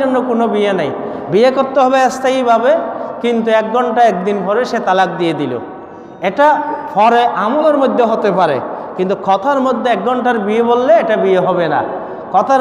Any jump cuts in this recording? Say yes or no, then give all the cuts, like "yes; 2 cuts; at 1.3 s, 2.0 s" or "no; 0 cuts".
no; 0 cuts